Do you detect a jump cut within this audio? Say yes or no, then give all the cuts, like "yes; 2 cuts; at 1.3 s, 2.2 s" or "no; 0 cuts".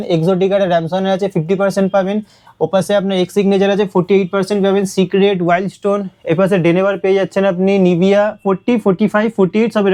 no; 0 cuts